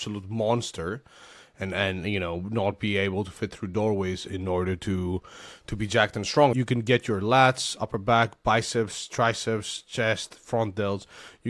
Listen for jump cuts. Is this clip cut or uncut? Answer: cut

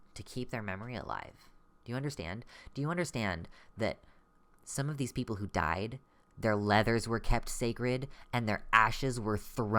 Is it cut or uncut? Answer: uncut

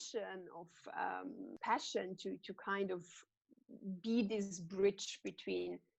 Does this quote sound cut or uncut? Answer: cut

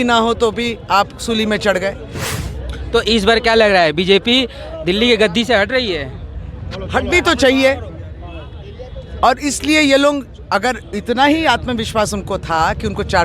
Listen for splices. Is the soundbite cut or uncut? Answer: cut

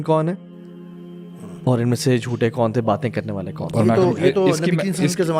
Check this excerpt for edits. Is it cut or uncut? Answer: uncut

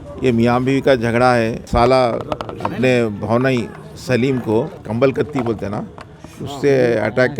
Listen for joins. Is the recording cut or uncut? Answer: cut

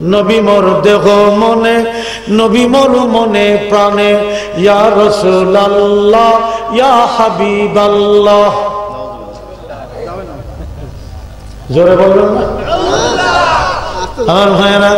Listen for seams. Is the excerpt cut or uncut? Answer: uncut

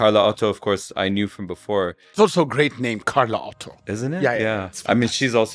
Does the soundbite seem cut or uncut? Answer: cut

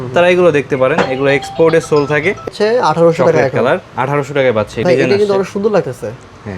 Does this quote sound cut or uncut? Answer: cut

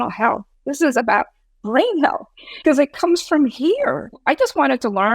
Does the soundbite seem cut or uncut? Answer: cut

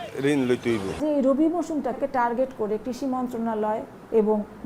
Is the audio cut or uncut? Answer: cut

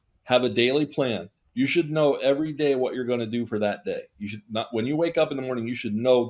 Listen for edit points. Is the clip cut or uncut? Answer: uncut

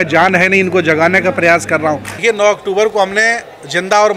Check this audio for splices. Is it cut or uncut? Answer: cut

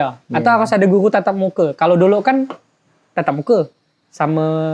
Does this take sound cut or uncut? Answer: uncut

